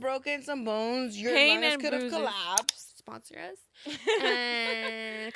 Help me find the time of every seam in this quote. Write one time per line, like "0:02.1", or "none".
0:03.0